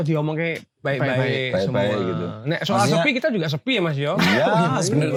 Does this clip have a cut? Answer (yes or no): no